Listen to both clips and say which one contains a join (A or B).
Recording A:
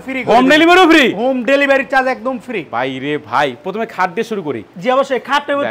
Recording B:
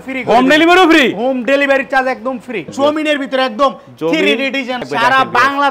B